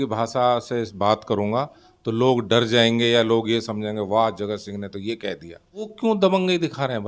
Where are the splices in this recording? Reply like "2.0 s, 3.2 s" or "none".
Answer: 5.9 s